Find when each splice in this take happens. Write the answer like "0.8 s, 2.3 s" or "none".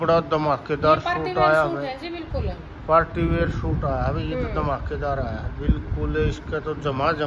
none